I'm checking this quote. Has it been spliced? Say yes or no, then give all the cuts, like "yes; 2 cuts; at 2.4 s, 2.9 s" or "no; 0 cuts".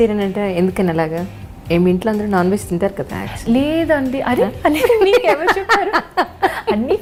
no; 0 cuts